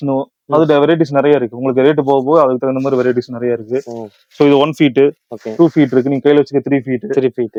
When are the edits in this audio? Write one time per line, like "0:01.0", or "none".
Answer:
none